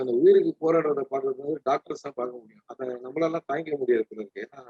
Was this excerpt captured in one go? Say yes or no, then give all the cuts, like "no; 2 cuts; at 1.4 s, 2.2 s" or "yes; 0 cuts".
yes; 0 cuts